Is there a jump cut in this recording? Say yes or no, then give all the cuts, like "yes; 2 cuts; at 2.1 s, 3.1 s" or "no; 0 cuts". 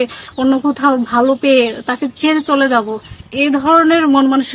yes; 1 cut; at 3.3 s